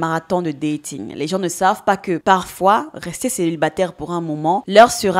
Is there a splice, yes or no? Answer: yes